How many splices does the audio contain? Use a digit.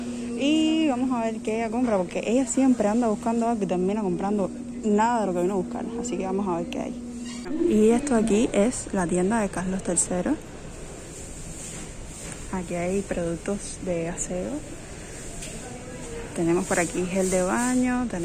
1